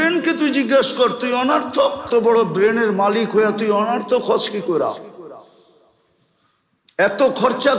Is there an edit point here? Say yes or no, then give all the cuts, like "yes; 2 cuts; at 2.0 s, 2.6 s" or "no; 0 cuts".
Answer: yes; 1 cut; at 2.0 s